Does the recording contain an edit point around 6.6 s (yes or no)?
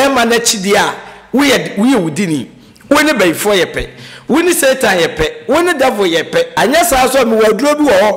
yes